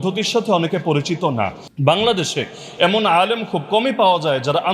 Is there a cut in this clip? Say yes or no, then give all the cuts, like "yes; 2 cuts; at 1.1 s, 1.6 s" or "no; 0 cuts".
yes; 1 cut; at 1.6 s